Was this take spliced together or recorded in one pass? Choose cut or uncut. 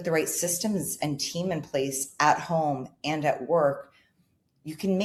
uncut